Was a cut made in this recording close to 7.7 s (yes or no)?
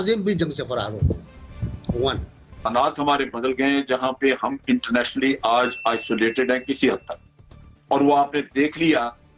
no